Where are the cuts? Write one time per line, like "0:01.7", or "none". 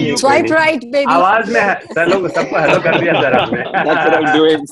none